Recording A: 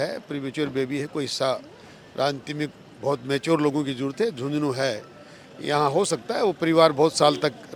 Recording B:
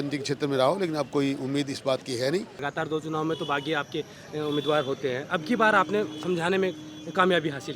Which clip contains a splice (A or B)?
B